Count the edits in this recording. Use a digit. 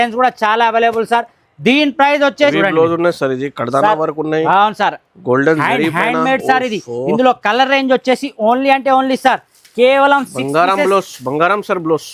1